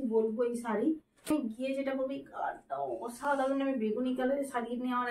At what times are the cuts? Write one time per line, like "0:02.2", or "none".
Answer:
0:01.3